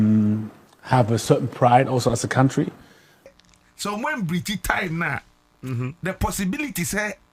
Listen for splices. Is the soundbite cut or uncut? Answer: cut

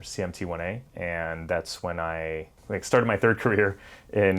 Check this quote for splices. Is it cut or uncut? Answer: cut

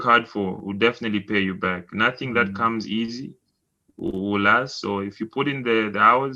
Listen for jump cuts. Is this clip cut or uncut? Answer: uncut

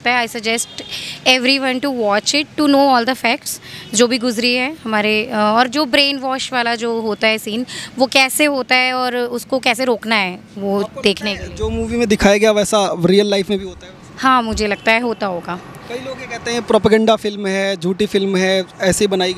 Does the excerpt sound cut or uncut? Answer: uncut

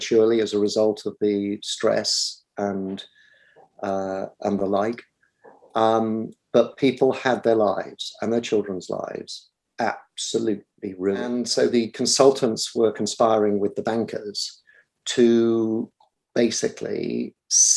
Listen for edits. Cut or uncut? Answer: cut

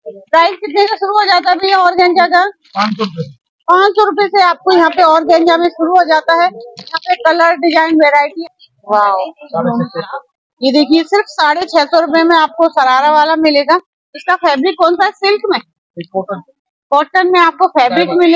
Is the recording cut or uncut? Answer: cut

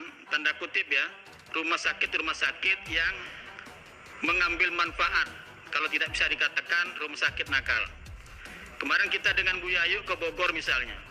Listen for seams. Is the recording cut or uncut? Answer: uncut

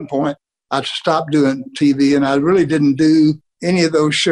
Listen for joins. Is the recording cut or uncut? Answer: uncut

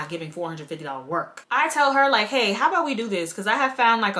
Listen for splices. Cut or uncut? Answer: uncut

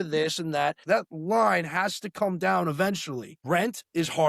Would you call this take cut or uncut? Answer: cut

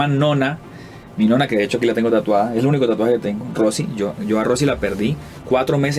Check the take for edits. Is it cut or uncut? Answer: uncut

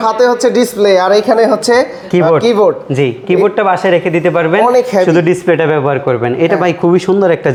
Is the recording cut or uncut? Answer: uncut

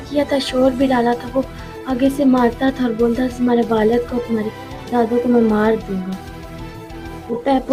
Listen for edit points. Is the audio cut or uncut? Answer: uncut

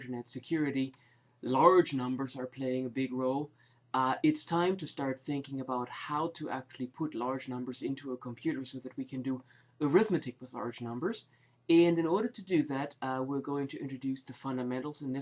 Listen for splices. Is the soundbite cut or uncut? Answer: uncut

